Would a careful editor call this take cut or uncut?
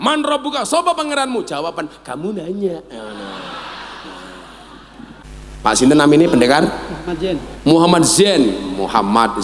cut